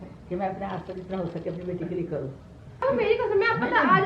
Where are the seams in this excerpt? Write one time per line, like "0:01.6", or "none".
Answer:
0:02.8